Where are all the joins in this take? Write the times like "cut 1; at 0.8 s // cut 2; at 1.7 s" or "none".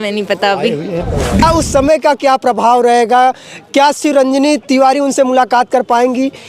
cut 1; at 1.4 s